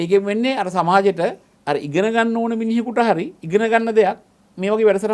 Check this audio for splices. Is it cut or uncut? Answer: cut